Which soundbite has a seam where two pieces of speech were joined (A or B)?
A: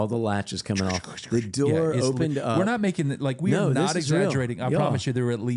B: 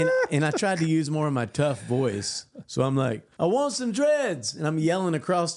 B